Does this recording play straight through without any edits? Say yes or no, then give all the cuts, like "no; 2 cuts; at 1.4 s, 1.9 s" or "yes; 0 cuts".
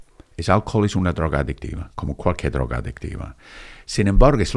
yes; 0 cuts